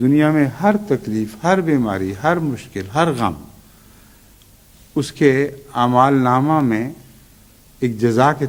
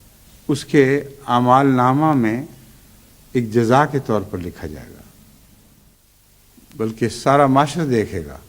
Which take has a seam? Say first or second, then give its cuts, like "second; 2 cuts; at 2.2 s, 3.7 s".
second; 1 cut; at 5.9 s